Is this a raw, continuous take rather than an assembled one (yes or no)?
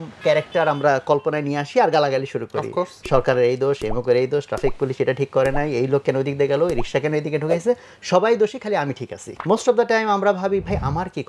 no